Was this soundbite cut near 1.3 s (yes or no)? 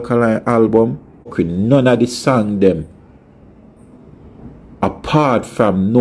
yes